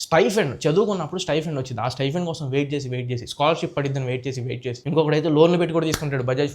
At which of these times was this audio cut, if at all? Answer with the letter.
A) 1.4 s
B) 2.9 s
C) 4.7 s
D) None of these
D